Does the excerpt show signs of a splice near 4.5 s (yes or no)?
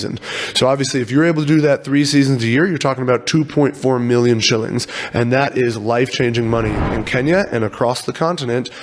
no